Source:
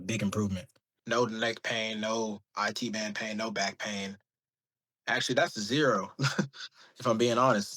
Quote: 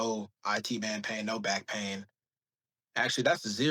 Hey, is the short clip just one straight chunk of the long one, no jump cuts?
yes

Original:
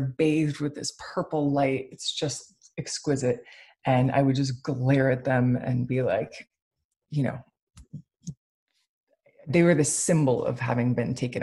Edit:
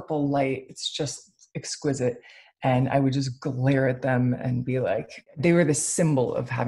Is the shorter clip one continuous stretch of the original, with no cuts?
no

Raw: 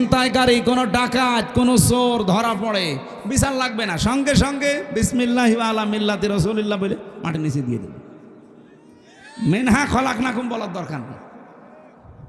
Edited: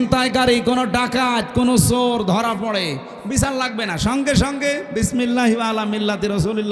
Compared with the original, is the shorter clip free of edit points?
yes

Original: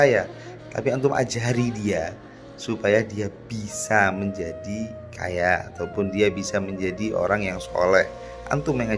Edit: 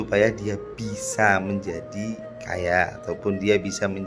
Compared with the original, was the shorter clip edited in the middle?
no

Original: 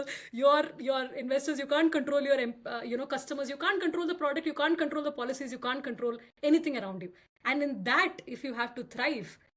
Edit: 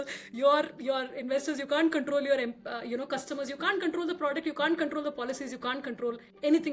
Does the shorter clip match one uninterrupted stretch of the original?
yes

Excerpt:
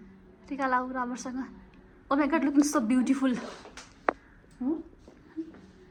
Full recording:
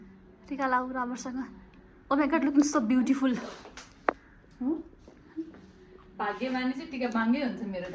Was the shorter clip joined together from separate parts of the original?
no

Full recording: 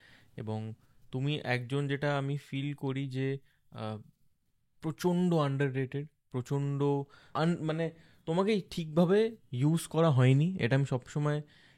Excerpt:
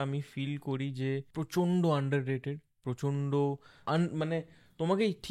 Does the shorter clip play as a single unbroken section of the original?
no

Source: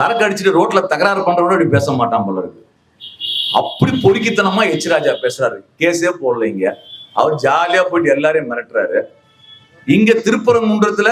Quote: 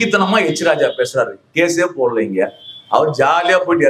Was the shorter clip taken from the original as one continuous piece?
yes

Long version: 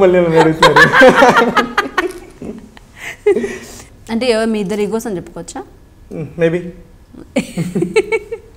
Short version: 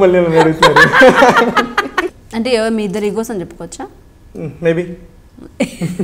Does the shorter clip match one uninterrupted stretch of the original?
no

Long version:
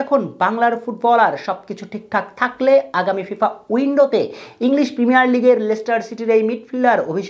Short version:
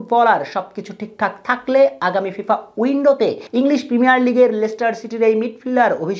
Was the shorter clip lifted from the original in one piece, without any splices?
no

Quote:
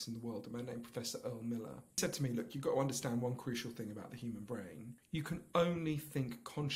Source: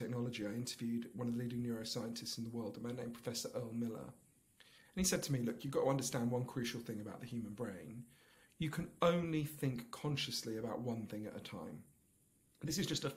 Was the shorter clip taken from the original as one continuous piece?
no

